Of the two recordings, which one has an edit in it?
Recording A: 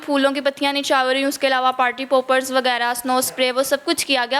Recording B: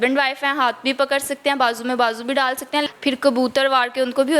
B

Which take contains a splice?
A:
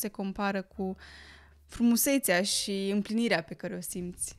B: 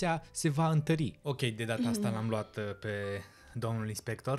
B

